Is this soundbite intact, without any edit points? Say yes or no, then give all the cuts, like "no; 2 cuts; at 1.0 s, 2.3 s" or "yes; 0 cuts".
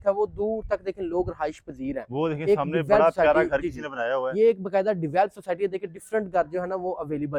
yes; 0 cuts